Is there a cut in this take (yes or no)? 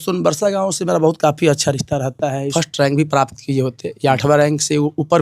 yes